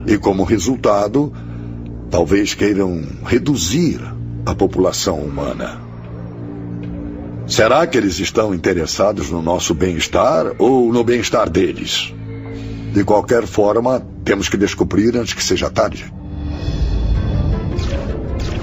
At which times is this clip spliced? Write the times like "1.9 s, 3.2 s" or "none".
13.1 s